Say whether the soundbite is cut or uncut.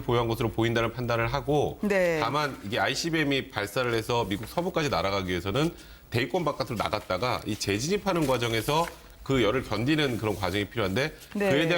uncut